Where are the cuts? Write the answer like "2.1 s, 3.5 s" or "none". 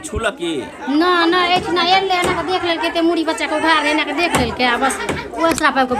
none